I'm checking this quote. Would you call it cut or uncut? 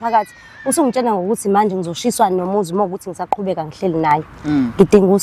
uncut